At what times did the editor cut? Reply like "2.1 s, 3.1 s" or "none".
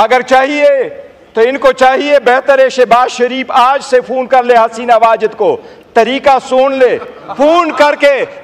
none